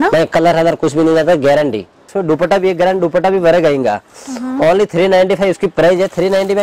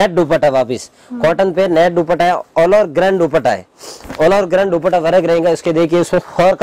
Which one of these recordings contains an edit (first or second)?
first